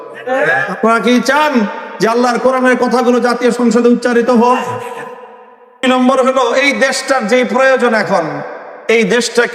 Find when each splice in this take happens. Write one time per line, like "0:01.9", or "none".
0:05.8